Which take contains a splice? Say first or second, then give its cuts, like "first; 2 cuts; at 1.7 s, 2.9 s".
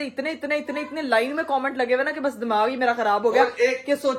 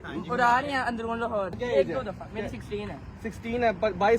second; 1 cut; at 1.6 s